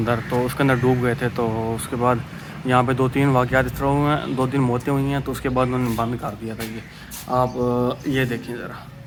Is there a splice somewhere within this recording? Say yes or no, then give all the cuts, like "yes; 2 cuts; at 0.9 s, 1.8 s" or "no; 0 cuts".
no; 0 cuts